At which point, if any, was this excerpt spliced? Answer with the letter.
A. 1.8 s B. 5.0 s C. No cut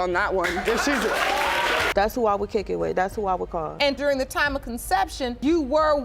A